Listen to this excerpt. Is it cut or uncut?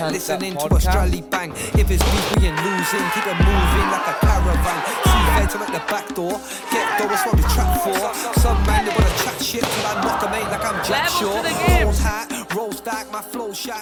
uncut